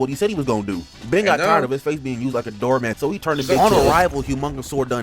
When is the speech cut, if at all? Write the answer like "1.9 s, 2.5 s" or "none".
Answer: 3.6 s